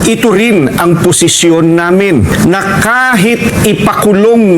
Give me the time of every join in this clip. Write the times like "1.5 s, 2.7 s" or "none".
2.3 s

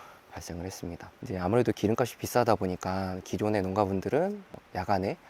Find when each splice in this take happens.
1.2 s

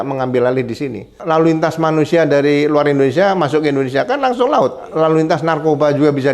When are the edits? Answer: 1.2 s, 4.8 s

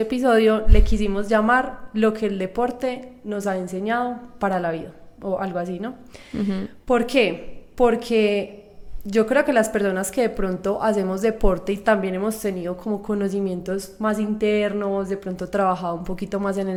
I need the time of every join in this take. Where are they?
none

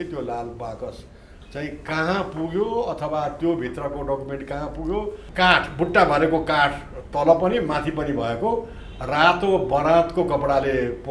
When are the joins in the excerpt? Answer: 5.2 s

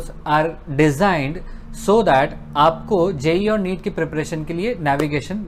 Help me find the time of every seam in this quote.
none

